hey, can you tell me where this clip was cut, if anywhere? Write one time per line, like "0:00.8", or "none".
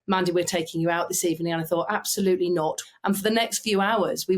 0:02.8